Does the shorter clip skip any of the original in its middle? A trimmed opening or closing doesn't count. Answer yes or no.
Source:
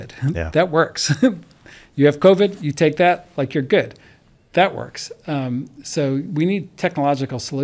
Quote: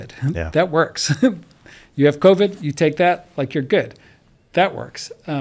no